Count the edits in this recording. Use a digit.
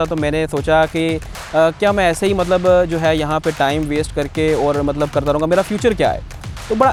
0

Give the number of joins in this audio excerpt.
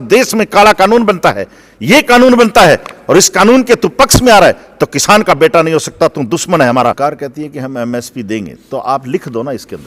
1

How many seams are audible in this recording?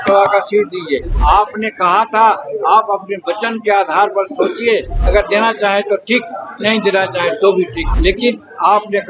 2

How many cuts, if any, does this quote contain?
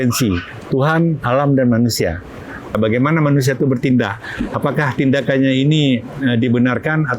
1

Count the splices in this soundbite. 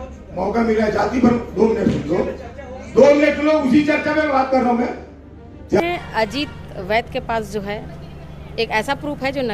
1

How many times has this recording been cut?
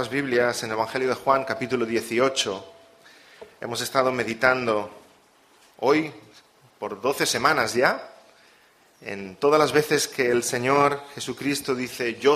1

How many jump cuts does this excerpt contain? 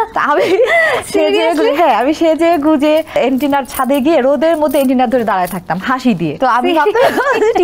2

